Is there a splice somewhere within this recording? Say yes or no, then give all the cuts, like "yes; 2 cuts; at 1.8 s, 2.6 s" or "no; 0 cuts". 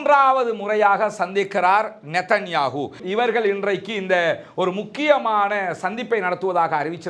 yes; 1 cut; at 3.0 s